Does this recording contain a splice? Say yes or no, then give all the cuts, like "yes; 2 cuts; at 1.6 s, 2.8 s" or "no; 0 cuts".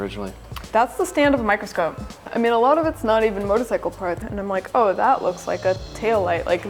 yes; 2 cuts; at 2.3 s, 4.2 s